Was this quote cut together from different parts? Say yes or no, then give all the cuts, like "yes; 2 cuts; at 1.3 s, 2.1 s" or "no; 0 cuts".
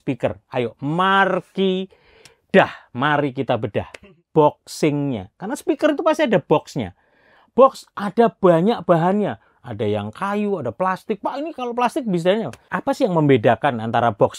yes; 2 cuts; at 4.1 s, 12.6 s